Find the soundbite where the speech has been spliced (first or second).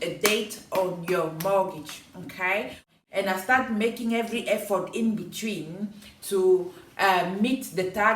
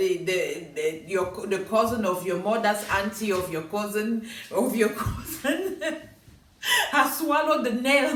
first